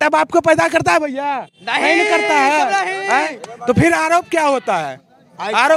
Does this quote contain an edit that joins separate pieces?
no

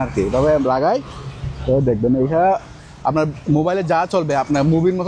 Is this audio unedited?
yes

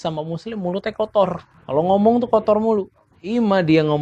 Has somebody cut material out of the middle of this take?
yes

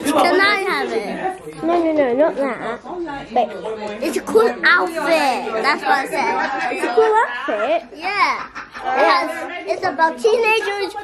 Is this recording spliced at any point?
no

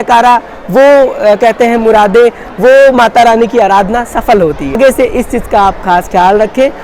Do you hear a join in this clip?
no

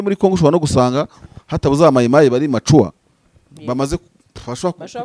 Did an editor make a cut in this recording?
no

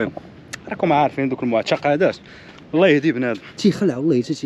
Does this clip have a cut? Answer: yes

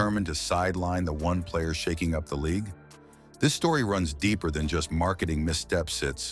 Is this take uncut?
yes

